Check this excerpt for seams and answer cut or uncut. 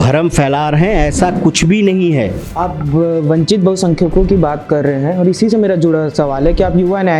cut